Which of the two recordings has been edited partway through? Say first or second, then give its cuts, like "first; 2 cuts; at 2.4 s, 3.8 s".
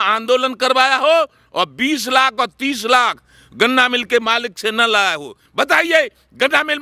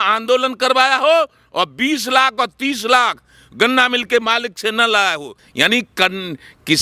second; 1 cut; at 5.4 s